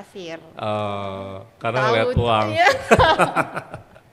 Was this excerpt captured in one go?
yes; 0 cuts

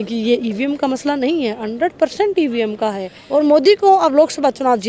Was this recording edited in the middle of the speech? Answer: yes; 1 cut; at 3.1 s

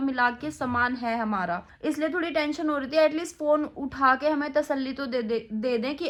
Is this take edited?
no; 0 cuts

